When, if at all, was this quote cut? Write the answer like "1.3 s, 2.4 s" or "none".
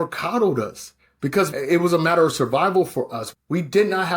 1.5 s, 3.2 s